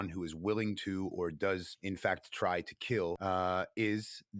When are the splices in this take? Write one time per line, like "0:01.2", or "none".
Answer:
0:01.7
0:03.2